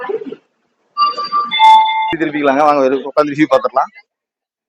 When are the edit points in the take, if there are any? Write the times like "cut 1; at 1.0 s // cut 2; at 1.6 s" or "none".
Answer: cut 1; at 2.2 s